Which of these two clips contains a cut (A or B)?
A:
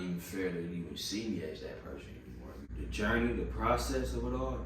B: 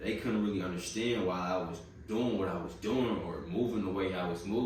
A